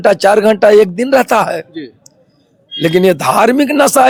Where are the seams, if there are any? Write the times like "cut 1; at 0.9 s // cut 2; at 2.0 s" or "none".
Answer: none